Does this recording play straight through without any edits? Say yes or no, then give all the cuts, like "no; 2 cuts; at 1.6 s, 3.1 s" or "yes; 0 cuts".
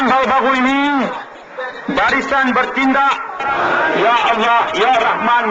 no; 1 cut; at 3.4 s